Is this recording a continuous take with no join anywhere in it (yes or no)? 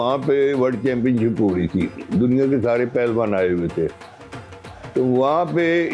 yes